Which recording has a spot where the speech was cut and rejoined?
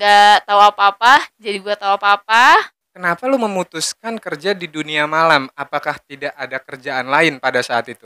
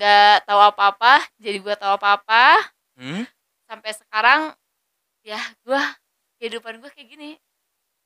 first; 1 cut; at 2.8 s

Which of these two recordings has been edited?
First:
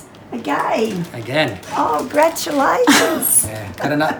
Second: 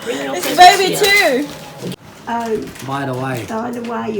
second; 1 cut; at 1.8 s

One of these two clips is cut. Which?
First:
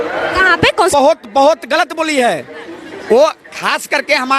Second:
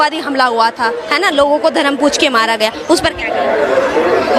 first; 1 cut; at 0.9 s

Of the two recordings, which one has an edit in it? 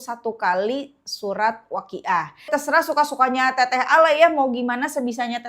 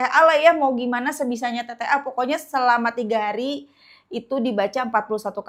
first; 1 cut; at 2.5 s

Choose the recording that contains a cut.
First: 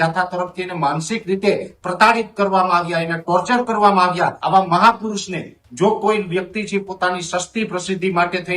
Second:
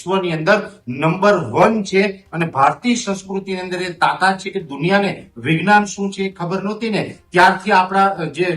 first; 1 cut; at 4.4 s

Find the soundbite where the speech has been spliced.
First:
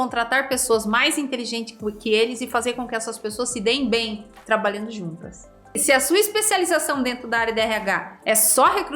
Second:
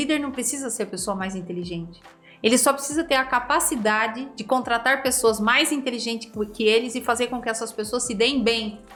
first; 1 cut; at 5.8 s

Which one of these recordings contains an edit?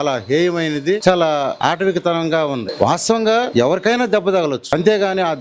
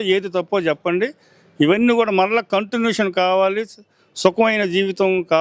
first; 5 cuts; at 1.0 s, 1.5 s, 2.7 s, 3.5 s, 4.6 s

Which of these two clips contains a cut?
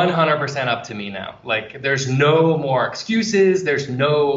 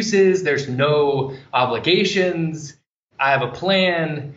second; 1 cut; at 3.0 s

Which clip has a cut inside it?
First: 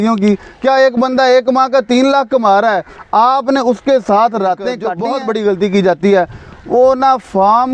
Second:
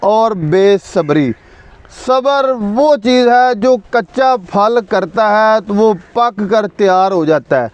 first; 1 cut; at 4.9 s

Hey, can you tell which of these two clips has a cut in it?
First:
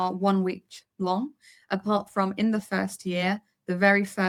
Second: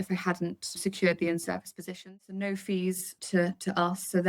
second; 3 cuts; at 0.8 s, 2.1 s, 3.1 s

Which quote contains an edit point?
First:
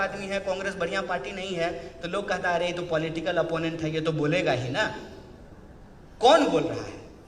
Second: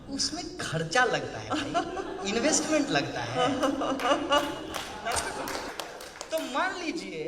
second; 1 cut; at 5.7 s

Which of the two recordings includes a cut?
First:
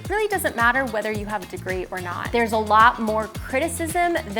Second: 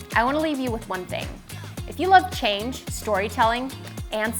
first; 1 cut; at 2.2 s

